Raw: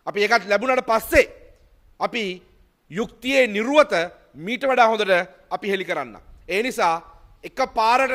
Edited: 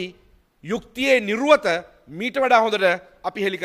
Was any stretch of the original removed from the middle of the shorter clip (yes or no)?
no